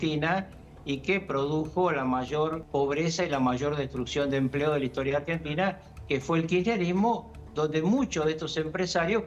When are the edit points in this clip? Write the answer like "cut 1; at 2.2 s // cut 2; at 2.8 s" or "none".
cut 1; at 2.6 s